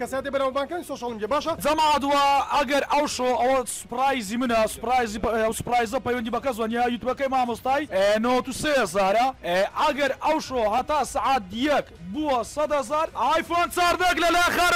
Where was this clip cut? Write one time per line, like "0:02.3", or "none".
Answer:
0:01.6